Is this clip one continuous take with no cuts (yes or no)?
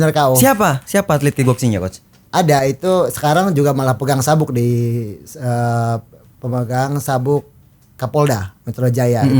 yes